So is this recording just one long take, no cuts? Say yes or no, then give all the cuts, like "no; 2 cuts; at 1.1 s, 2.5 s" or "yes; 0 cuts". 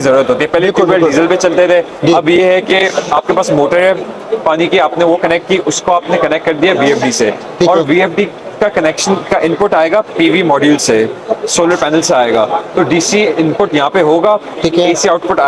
yes; 0 cuts